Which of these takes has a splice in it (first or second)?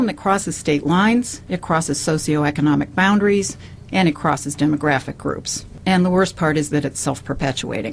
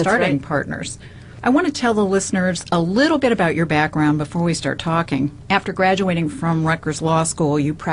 second